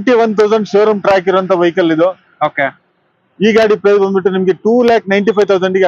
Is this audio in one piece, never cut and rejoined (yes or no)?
yes